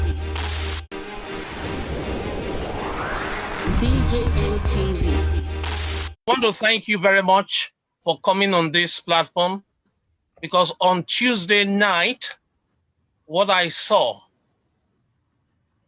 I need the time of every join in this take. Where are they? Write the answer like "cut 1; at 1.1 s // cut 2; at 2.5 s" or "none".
cut 1; at 0.9 s